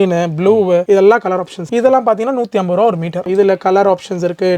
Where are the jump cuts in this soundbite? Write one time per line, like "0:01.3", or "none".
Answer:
0:01.6
0:03.3